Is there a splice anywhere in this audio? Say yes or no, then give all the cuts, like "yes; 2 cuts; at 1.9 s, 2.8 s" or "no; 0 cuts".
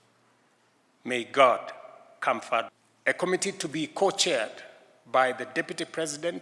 yes; 1 cut; at 2.8 s